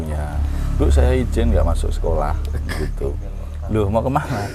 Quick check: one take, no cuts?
yes; 0 cuts

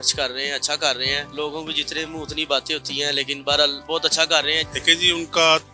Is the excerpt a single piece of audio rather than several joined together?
no; 3 cuts; at 1.3 s, 3.8 s, 4.6 s

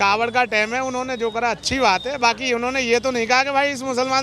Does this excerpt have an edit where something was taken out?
no; 0 cuts

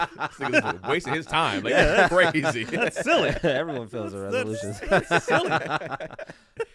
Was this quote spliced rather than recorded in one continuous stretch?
no; 0 cuts

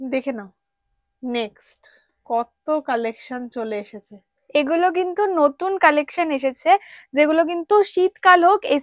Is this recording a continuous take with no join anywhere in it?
yes; 0 cuts

